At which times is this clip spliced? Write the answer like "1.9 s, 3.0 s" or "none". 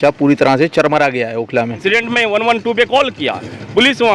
1.8 s